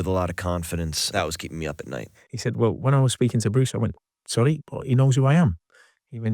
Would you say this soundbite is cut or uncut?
cut